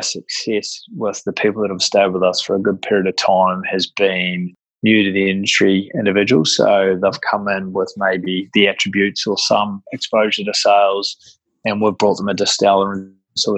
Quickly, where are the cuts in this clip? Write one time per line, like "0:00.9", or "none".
none